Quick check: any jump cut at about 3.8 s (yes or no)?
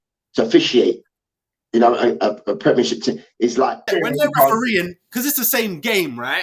yes